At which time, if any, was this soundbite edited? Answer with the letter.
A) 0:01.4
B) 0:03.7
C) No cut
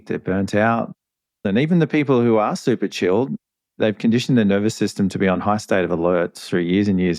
A